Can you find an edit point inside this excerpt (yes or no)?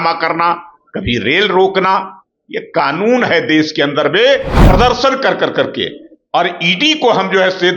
yes